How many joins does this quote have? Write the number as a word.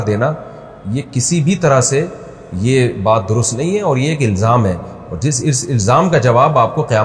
zero